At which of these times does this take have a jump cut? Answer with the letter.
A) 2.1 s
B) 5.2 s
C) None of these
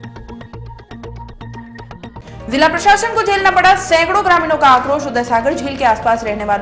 A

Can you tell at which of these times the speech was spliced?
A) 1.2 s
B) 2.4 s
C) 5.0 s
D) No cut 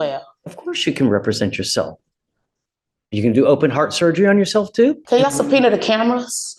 C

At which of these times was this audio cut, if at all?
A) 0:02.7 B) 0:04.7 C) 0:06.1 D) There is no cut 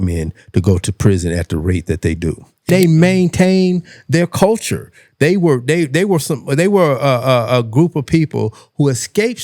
A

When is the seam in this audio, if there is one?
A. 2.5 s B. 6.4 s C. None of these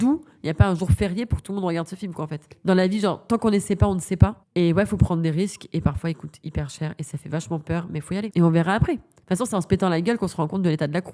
A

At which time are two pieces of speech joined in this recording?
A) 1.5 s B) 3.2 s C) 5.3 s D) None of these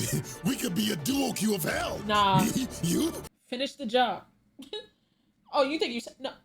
B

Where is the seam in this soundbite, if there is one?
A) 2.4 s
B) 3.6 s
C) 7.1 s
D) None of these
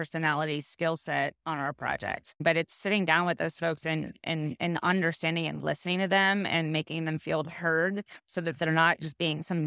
A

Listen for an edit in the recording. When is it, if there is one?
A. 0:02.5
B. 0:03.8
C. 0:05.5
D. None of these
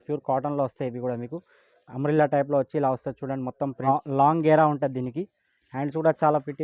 B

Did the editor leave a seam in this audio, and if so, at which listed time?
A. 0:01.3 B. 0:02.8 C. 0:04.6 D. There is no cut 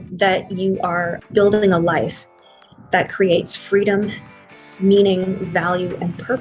A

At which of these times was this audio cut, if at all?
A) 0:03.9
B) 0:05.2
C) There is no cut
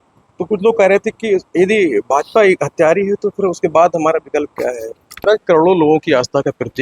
B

